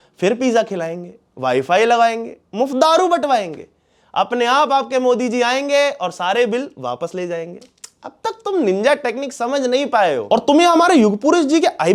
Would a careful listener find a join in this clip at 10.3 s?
no; 0 cuts

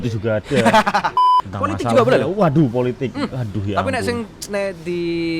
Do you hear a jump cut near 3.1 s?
no; 1 cut; at 1.1 s

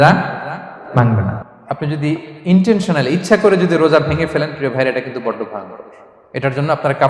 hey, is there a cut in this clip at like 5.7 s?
no; 1 cut; at 1.4 s

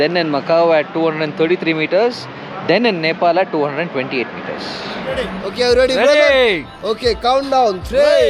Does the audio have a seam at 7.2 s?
no; 1 cut; at 5.3 s

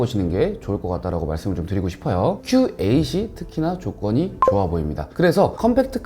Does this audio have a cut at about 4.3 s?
no; 1 cut; at 2.4 s

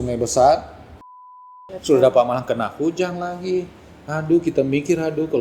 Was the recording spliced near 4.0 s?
no; 1 cut; at 1.4 s

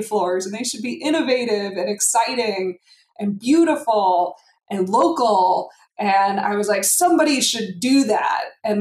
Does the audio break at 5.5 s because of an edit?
no; 0 cuts

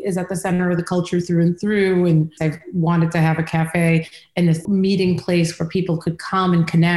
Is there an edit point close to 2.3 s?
yes; 1 cut; at 2.3 s

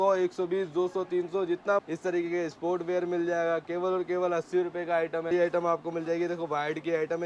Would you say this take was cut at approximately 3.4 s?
no; 2 cuts; at 1.8 s, 5.3 s

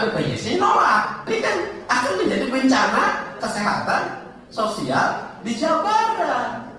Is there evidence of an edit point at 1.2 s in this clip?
yes; 1 cut; at 1.2 s

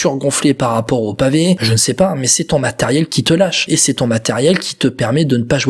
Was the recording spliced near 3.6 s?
yes; 2 cuts; at 1.6 s, 3.6 s

